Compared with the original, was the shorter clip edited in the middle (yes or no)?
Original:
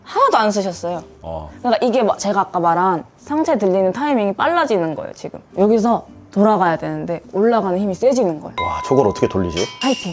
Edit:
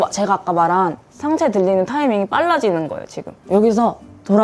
no